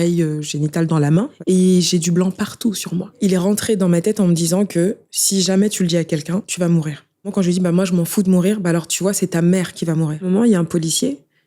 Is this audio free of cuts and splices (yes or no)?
no